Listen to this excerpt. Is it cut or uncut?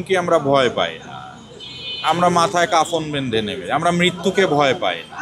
uncut